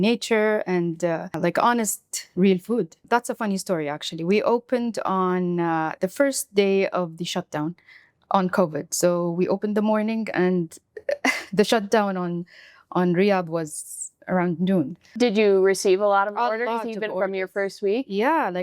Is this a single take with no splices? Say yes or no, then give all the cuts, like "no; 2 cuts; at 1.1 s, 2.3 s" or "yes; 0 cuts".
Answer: no; 3 cuts; at 1.4 s, 3.0 s, 15.0 s